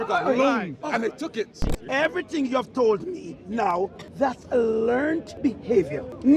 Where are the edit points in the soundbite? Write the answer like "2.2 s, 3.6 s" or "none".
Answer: 1.7 s, 4.0 s, 5.5 s